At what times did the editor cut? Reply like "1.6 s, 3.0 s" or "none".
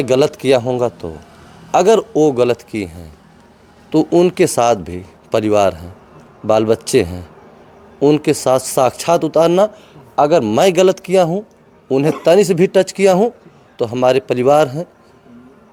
none